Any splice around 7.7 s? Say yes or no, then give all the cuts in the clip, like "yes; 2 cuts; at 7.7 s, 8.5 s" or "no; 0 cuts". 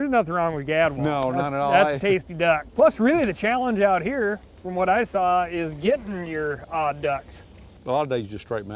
yes; 2 cuts; at 2.7 s, 7.7 s